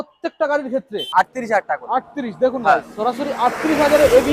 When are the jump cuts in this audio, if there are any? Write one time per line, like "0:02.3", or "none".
0:01.1